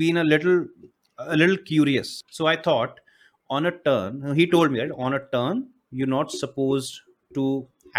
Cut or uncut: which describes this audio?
cut